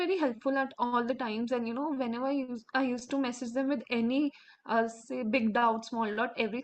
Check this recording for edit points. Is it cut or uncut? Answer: uncut